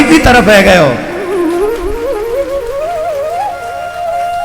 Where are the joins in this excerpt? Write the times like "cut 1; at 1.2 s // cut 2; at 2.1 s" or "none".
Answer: none